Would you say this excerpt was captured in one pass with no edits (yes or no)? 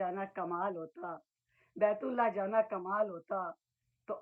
yes